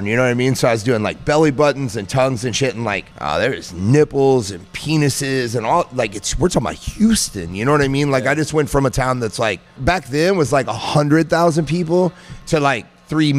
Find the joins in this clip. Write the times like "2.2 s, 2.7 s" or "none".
3.1 s, 9.8 s, 12.3 s